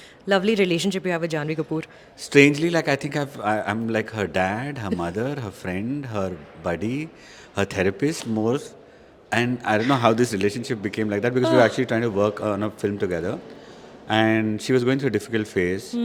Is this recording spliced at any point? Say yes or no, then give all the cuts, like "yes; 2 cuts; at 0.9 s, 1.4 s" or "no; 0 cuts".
no; 0 cuts